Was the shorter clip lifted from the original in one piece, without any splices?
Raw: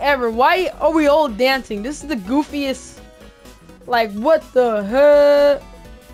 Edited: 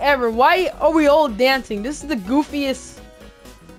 yes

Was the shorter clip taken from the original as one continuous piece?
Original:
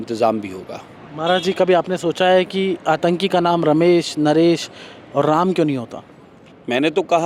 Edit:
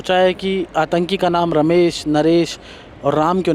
yes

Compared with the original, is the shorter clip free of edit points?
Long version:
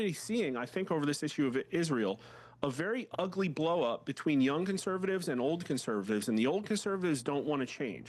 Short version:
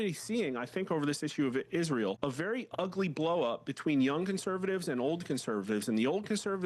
no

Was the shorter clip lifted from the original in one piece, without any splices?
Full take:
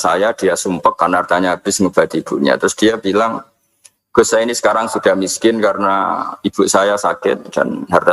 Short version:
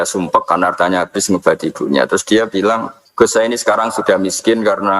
no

